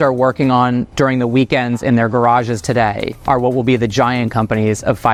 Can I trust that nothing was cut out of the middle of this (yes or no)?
yes